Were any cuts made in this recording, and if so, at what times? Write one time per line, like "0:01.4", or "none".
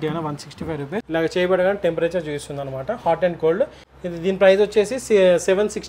0:01.0
0:03.8